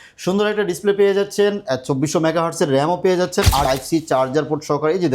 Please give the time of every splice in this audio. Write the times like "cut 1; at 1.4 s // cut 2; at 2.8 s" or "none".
cut 1; at 3.6 s